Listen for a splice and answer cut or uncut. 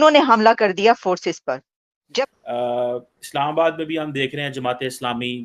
cut